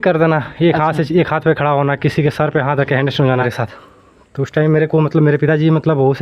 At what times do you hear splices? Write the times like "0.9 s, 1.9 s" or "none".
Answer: 3.5 s